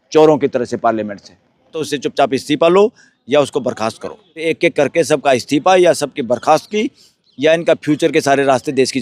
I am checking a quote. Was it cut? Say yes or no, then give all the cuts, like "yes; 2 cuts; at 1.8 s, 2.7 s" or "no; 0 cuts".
yes; 2 cuts; at 1.9 s, 4.4 s